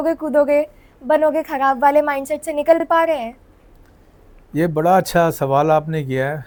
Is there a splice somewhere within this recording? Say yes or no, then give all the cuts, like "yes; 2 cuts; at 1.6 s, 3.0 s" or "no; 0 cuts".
no; 0 cuts